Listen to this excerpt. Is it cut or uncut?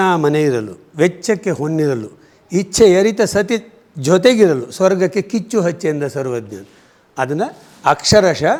uncut